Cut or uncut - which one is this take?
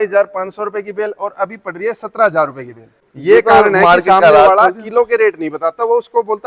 cut